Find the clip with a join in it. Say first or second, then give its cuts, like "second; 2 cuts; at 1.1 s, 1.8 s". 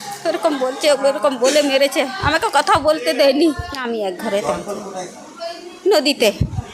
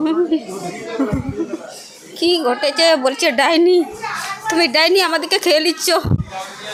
first; 1 cut; at 3.7 s